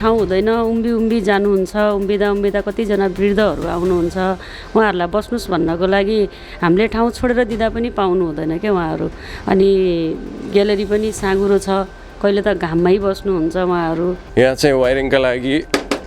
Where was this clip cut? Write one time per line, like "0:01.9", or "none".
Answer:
0:14.2